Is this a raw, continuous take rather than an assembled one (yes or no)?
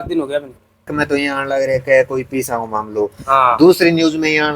no